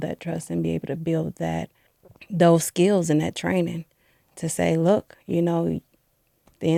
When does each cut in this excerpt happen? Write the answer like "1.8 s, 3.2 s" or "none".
none